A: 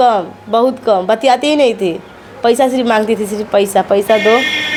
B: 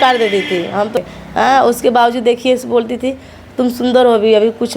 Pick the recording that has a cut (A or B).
B